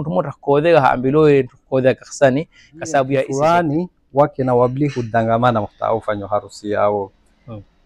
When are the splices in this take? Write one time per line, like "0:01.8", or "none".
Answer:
0:03.3